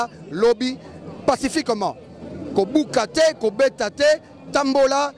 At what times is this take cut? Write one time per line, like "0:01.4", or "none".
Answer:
none

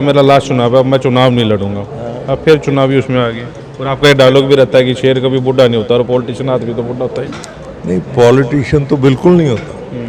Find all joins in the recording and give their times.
none

